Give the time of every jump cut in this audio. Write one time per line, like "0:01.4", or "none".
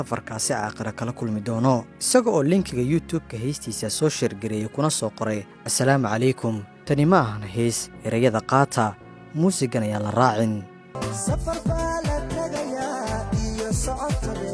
0:02.0
0:10.7